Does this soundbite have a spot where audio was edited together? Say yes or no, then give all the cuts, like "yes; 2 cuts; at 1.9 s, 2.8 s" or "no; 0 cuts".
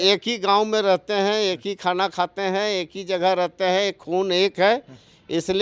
no; 0 cuts